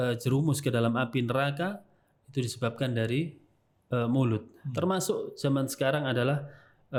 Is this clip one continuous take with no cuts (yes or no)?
yes